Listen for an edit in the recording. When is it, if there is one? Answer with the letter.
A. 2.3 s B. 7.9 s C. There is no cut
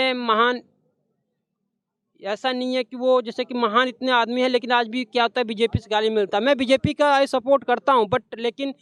C